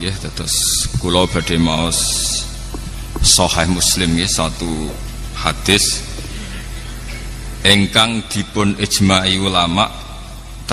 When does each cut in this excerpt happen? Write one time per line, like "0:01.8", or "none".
none